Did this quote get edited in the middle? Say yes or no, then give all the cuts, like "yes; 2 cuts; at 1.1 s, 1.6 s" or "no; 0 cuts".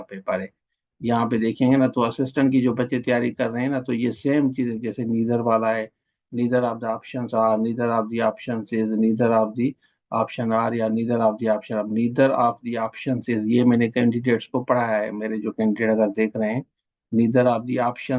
no; 0 cuts